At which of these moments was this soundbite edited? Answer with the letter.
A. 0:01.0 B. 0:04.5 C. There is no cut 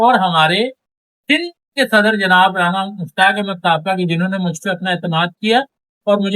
C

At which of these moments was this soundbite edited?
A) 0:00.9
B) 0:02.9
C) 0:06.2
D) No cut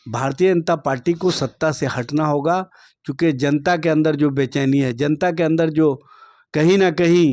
D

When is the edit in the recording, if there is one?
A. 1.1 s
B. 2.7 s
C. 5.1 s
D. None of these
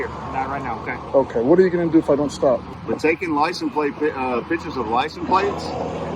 B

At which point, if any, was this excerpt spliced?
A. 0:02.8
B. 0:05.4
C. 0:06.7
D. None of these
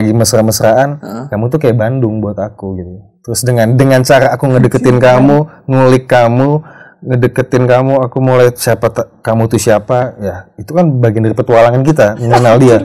D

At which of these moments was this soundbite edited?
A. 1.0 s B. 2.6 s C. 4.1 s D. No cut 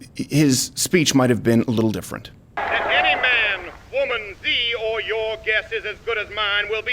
B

